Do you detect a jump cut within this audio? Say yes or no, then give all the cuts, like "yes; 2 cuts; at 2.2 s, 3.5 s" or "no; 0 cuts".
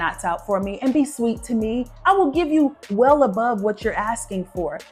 no; 0 cuts